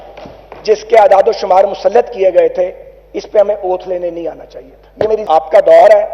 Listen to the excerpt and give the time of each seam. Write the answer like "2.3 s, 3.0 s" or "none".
5.2 s